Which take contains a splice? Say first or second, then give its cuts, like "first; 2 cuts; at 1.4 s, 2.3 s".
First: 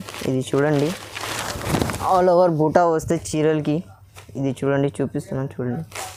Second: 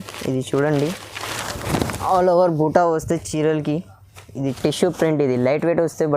second; 1 cut; at 4.6 s